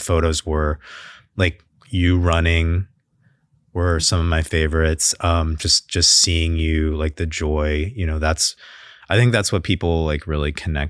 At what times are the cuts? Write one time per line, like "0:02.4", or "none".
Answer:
none